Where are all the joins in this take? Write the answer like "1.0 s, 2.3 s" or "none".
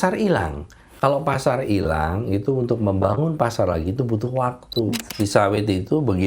5.0 s